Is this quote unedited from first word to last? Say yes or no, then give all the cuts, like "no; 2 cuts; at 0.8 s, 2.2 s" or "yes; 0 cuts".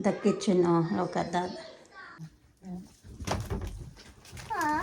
no; 1 cut; at 2.2 s